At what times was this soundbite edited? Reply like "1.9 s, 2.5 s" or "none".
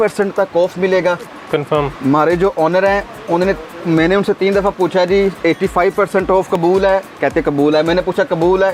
none